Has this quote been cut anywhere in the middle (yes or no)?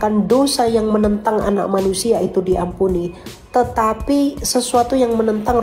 no